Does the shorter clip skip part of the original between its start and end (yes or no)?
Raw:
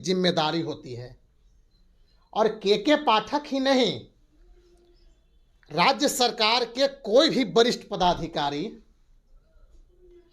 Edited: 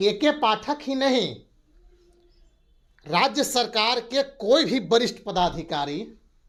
no